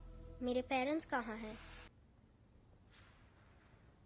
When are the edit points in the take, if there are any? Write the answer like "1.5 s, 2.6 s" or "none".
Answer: 1.9 s